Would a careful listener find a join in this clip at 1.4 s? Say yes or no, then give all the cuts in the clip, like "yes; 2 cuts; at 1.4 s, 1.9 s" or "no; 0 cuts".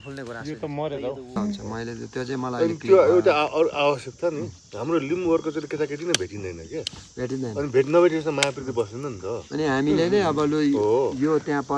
yes; 1 cut; at 1.4 s